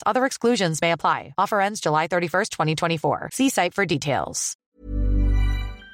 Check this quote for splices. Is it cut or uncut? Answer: cut